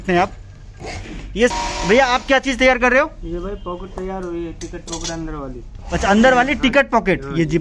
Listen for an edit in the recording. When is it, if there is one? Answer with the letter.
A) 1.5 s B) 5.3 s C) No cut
A